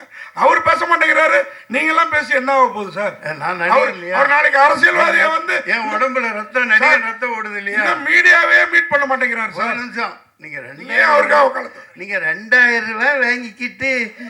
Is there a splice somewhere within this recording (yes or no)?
no